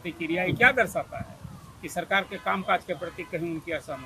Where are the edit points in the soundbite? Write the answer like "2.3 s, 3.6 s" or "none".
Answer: none